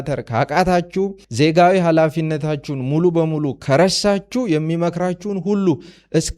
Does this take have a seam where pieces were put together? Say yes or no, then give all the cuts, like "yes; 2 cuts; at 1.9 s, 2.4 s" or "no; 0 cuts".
yes; 1 cut; at 1.2 s